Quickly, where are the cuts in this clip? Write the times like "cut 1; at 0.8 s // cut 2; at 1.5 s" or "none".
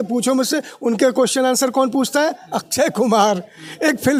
none